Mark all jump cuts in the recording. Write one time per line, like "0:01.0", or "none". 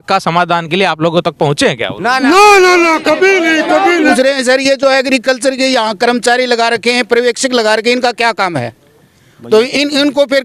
0:04.1